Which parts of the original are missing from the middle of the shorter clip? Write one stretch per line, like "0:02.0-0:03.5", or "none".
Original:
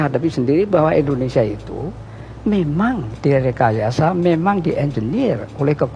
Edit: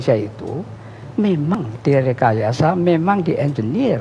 0:02.8-0:02.9